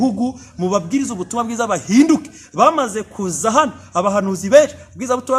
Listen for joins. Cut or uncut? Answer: uncut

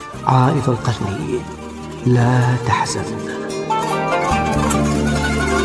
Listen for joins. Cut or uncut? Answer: cut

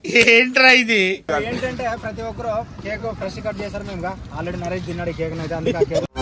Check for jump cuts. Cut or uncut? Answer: uncut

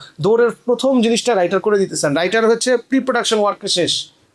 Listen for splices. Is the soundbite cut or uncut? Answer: uncut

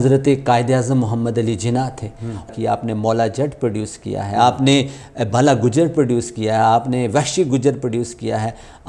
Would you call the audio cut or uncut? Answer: cut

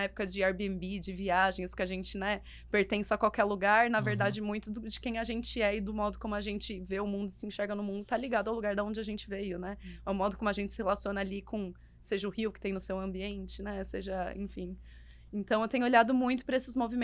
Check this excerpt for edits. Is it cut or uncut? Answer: uncut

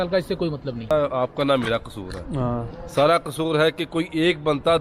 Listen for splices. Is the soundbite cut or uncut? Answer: cut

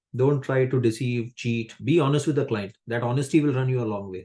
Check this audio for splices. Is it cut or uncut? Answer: uncut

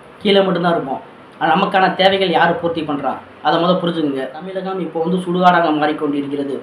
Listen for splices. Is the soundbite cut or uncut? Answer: cut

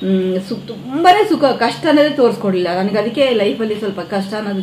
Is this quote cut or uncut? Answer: uncut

